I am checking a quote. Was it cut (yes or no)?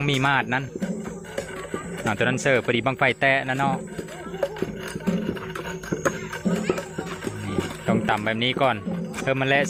no